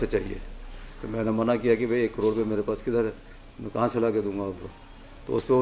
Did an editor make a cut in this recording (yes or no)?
no